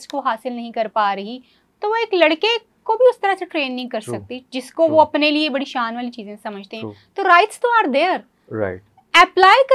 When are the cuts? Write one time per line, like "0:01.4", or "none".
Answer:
none